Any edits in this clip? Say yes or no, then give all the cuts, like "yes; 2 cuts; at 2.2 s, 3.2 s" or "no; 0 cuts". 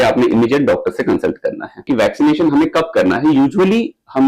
yes; 1 cut; at 1.8 s